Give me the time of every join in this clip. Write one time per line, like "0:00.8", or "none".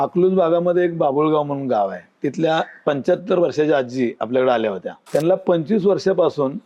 0:04.9